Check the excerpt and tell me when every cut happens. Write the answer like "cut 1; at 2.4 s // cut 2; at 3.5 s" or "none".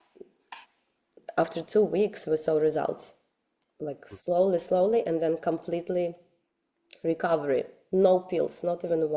none